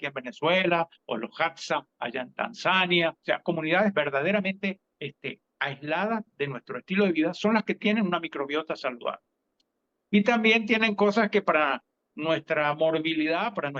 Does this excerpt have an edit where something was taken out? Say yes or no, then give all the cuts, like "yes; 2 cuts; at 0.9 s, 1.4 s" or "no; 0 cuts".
no; 0 cuts